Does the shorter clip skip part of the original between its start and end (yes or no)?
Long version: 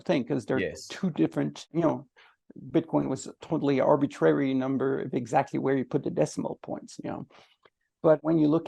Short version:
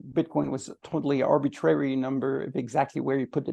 no